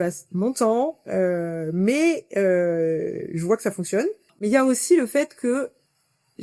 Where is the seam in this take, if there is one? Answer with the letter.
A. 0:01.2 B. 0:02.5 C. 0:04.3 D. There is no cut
C